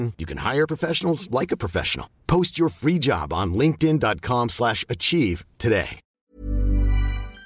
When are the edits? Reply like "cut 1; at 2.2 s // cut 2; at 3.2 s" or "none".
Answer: cut 1; at 6.3 s